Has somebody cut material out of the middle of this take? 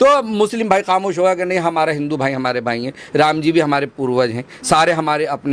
no; 0 cuts

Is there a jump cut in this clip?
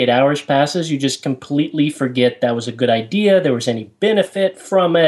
no; 0 cuts

